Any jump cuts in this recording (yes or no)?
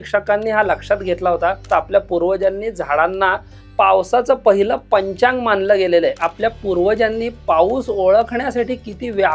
yes